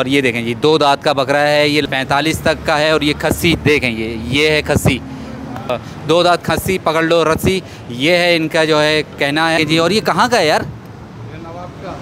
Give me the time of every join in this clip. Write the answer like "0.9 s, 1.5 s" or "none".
1.8 s, 9.6 s